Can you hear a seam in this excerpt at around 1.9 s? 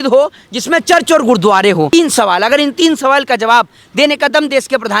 yes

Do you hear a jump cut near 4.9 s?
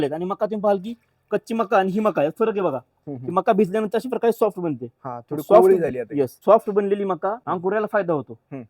no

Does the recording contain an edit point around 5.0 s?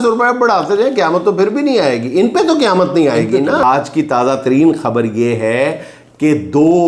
no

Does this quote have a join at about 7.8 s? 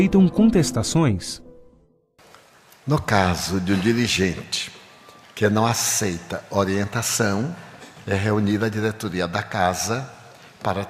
no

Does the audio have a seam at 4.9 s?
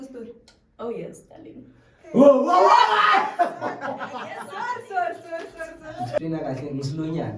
no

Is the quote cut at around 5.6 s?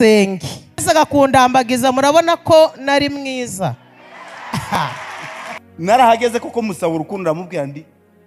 yes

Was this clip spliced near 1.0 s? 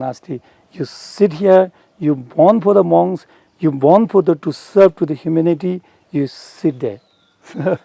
no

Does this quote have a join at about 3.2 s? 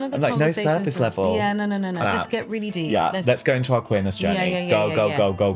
yes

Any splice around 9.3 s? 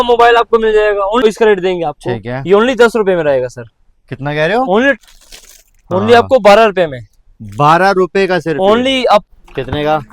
yes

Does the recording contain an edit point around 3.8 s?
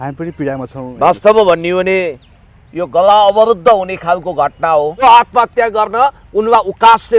no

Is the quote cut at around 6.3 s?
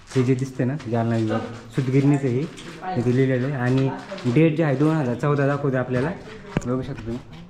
no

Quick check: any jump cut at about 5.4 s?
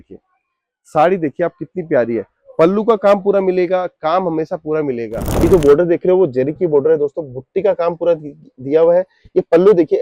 yes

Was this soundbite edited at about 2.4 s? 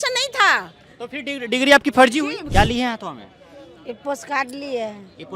yes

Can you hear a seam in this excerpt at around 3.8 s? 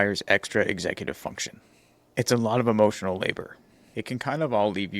yes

